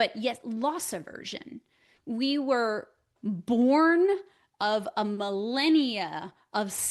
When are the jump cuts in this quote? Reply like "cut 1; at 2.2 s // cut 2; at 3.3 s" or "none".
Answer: cut 1; at 1.9 s // cut 2; at 3.1 s